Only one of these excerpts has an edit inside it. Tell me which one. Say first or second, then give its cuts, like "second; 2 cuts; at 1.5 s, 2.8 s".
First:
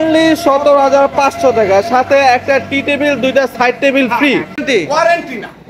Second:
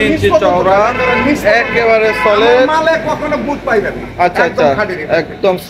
first; 1 cut; at 4.6 s